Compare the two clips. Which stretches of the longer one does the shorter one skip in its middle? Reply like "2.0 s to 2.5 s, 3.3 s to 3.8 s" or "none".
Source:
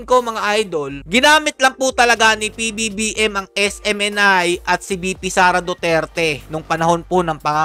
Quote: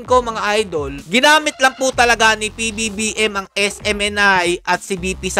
none